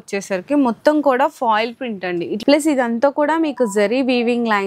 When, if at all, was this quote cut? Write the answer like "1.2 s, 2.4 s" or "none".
2.3 s